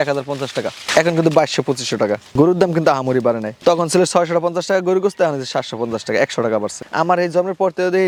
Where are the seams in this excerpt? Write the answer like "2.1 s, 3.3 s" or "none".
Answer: none